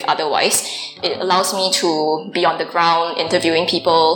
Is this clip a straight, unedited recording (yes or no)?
no